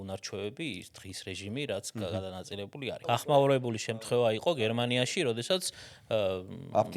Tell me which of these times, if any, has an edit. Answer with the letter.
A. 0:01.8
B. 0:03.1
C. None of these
B